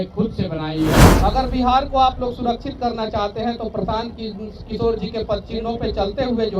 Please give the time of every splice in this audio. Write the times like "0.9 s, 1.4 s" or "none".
1.0 s